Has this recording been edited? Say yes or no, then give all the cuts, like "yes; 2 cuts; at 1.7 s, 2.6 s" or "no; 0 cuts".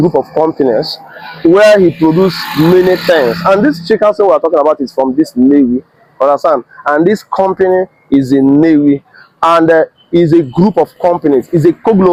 no; 0 cuts